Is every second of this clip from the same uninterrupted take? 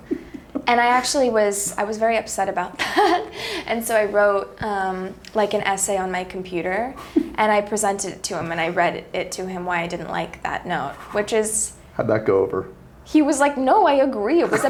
yes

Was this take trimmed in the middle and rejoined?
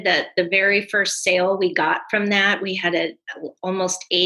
no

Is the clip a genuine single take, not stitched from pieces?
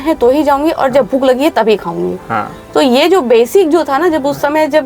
yes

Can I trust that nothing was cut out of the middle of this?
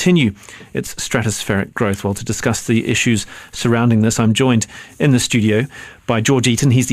no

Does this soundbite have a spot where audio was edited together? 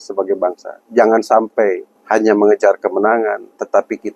yes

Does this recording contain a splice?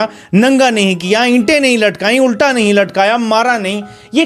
no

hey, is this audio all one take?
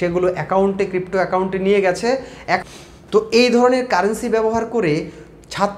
no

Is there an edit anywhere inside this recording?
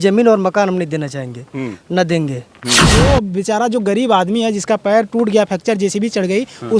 yes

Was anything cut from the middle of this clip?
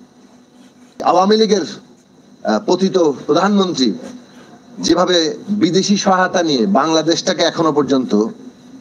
yes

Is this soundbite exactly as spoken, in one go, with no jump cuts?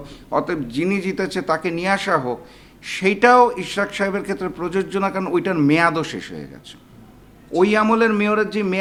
yes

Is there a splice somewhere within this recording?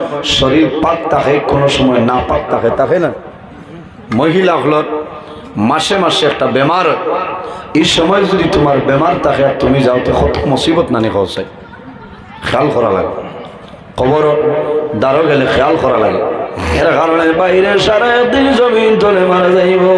yes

